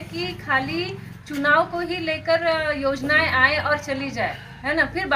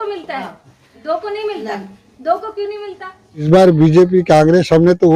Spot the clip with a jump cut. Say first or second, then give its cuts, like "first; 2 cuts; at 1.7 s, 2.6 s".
second; 1 cut; at 3.5 s